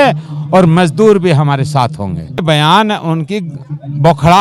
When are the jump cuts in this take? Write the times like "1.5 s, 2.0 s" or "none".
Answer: 2.4 s

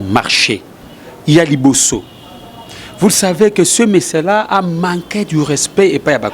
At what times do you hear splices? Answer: none

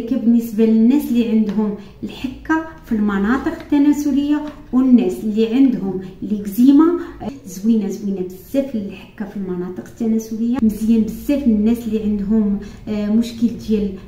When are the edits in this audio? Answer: 7.2 s, 10.6 s

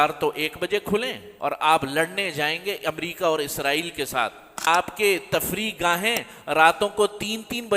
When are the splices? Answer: 1.2 s, 4.7 s

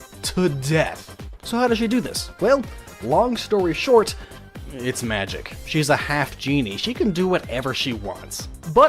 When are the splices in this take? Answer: 7.2 s

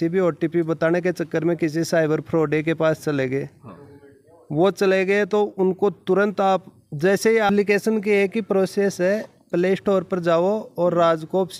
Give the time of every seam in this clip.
7.5 s

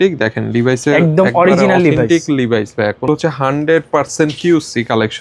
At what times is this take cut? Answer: 3.1 s

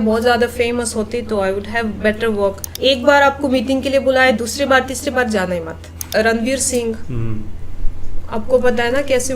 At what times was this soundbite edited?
2.7 s, 6.1 s

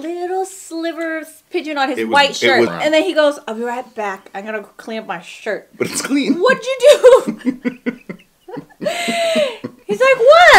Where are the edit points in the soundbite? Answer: 2.7 s, 5.7 s

